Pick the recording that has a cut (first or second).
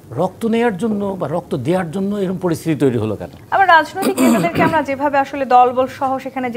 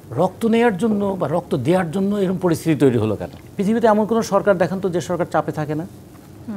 second